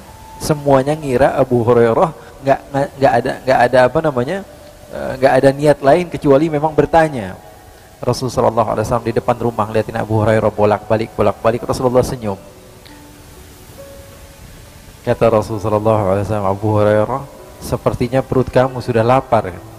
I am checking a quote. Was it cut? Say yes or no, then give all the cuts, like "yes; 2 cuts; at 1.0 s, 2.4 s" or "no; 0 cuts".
no; 0 cuts